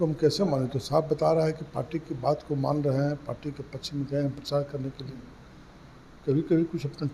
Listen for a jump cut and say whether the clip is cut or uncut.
uncut